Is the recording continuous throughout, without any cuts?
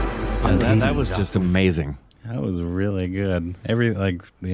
no; 1 cut; at 0.9 s

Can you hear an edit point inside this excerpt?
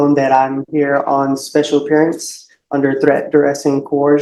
no; 0 cuts

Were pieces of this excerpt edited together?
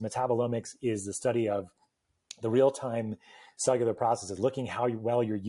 no; 0 cuts

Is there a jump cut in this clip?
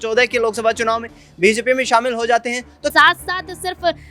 yes; 1 cut; at 2.9 s

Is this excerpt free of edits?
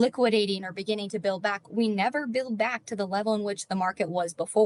yes; 0 cuts

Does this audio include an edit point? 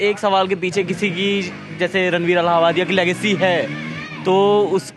no; 0 cuts

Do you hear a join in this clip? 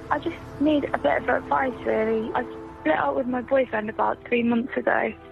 yes; 1 cut; at 2.3 s

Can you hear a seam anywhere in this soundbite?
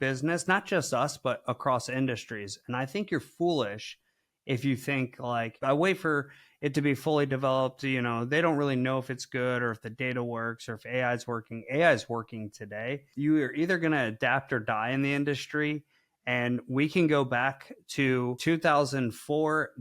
yes; 3 cuts; at 5.5 s, 13.1 s, 18.4 s

